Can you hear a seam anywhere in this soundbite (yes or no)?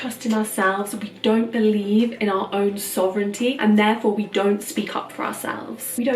no